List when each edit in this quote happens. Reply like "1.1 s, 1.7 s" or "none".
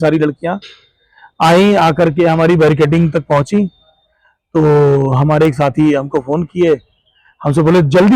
none